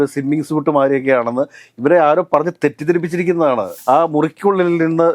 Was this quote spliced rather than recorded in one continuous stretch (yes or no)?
yes